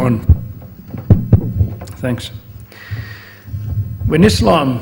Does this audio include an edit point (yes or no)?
no